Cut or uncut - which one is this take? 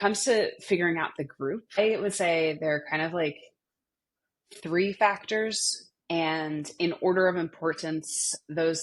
cut